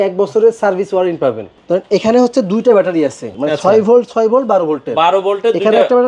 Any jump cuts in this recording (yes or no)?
yes